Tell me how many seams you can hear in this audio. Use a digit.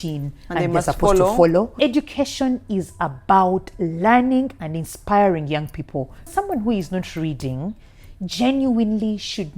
2